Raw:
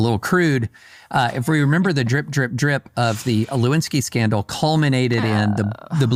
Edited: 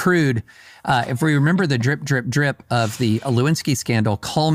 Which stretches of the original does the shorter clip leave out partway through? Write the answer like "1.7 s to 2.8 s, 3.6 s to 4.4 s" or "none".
none